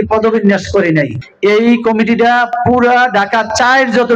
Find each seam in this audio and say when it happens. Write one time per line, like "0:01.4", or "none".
0:01.2